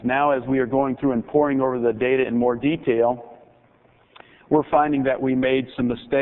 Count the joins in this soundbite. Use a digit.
1